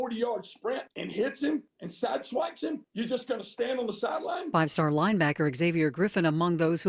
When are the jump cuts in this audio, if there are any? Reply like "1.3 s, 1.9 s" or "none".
1.4 s, 2.8 s